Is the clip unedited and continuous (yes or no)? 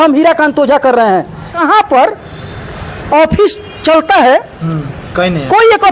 no